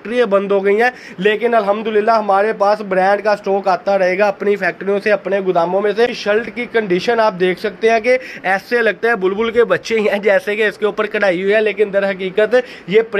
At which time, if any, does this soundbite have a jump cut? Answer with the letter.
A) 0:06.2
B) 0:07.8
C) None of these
A